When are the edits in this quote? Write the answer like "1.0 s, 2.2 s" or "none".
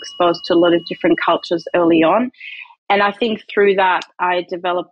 none